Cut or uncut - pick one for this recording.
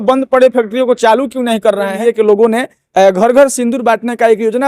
cut